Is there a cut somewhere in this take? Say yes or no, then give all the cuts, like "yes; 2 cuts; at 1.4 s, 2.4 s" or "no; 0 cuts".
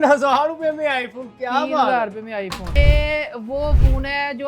yes; 1 cut; at 2.8 s